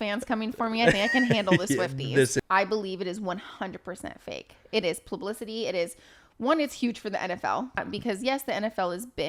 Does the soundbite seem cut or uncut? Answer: cut